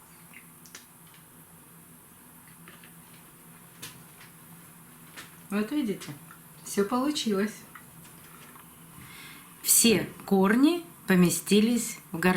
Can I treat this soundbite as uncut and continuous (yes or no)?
no